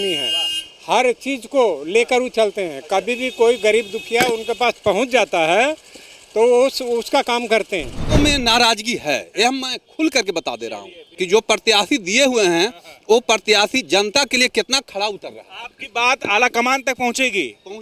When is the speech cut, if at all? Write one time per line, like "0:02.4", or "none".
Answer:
0:08.0
0:11.1